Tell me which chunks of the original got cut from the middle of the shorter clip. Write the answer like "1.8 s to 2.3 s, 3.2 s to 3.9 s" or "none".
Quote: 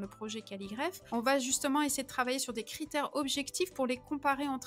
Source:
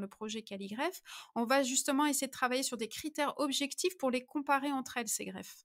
1.0 s to 1.2 s

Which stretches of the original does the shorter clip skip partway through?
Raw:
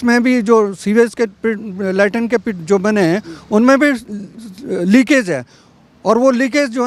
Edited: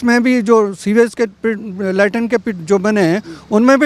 none

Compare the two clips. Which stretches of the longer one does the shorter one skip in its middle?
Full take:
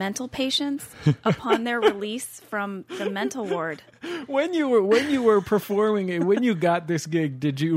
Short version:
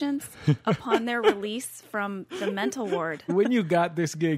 3.8 s to 6.2 s

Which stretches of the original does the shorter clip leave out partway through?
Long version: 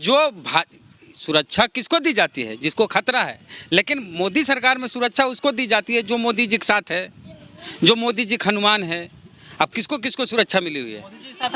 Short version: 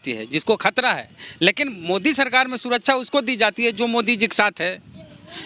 none

